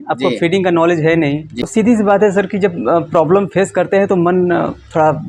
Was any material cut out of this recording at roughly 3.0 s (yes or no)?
no